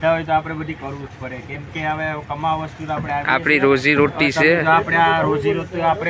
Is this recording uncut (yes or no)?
yes